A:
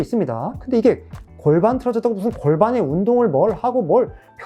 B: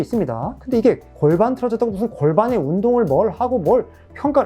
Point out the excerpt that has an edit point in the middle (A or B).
B